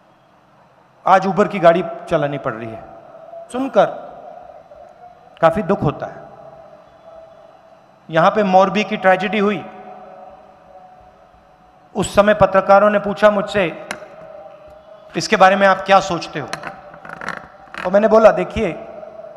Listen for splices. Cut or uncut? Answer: cut